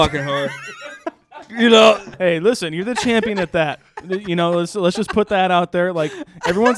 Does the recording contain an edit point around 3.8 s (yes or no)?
no